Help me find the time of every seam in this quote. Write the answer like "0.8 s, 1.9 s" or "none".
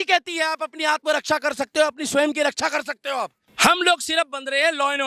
3.4 s